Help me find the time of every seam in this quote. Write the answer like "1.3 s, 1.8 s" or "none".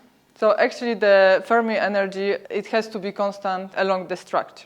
2.4 s, 3.7 s